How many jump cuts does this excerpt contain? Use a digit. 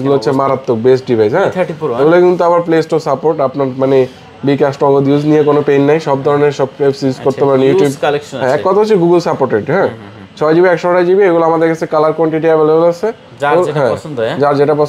0